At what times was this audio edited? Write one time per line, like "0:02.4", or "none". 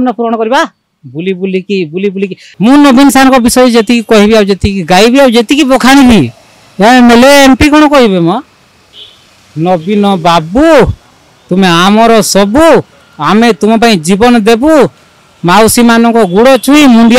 0:02.4